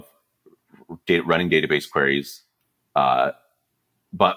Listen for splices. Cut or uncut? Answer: uncut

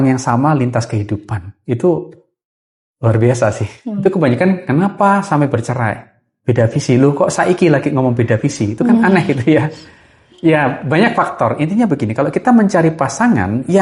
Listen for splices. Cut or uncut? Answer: cut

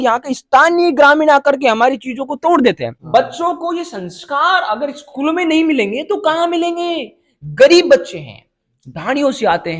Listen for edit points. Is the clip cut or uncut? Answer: cut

